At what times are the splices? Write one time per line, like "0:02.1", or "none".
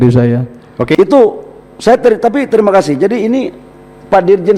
0:01.0